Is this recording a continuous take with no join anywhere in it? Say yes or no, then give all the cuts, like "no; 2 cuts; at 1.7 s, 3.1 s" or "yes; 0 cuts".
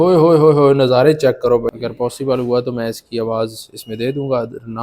no; 1 cut; at 1.7 s